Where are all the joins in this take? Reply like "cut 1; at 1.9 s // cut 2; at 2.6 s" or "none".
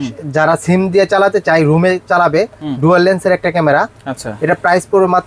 none